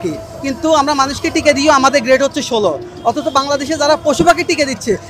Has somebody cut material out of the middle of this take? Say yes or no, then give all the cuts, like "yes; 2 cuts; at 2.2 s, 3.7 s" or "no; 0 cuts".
no; 0 cuts